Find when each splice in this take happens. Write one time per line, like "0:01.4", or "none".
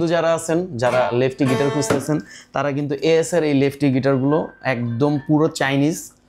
none

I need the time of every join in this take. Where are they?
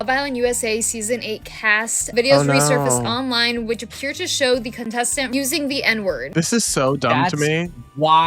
0:02.1
0:05.3
0:06.2

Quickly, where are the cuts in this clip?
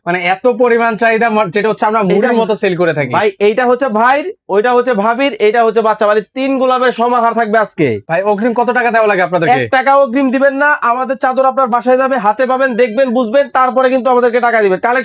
0:08.0

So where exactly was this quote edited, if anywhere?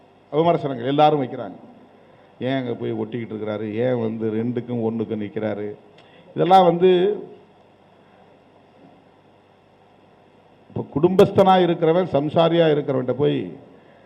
none

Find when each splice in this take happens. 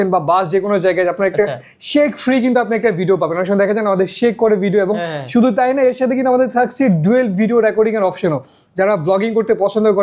none

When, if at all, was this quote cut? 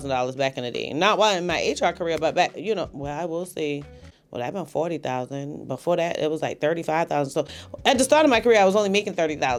none

